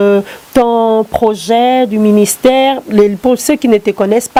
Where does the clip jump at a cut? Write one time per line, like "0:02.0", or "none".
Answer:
none